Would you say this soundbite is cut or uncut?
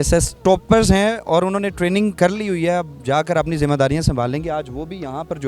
uncut